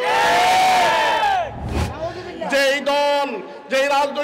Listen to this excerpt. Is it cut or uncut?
cut